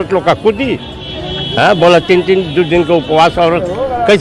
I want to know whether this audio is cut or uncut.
uncut